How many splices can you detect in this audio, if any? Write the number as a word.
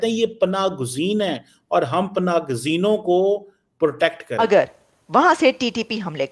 one